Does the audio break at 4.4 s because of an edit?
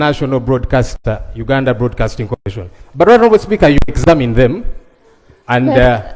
no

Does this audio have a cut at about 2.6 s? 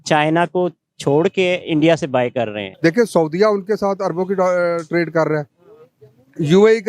yes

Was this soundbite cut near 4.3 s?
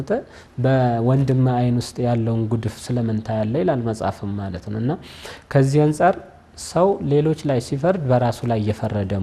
no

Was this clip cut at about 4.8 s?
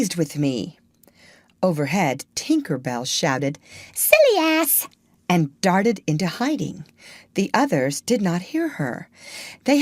yes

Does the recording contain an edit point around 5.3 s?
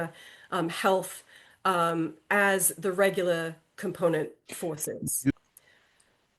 yes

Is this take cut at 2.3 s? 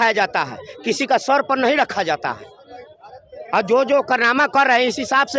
no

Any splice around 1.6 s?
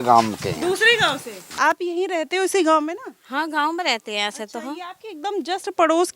yes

